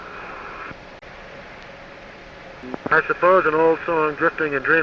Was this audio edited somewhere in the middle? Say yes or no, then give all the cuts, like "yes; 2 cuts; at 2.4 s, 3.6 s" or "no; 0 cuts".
yes; 1 cut; at 2.7 s